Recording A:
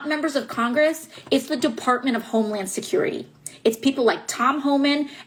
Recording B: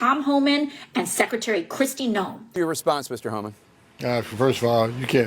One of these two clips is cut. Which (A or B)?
B